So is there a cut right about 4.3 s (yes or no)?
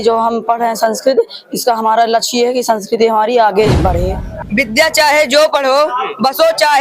yes